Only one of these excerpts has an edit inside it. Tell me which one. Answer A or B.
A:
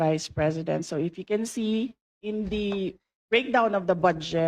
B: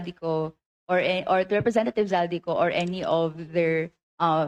A